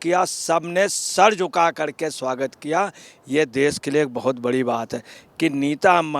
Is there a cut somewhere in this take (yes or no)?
yes